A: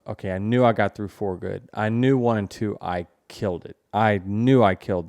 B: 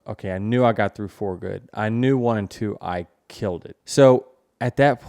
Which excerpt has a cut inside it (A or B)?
B